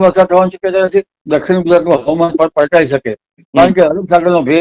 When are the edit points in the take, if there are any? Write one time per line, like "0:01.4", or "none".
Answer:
0:01.2